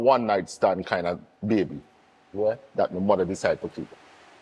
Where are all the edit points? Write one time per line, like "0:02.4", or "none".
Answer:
none